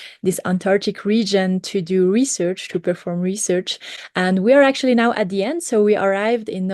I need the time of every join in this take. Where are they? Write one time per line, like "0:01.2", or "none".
none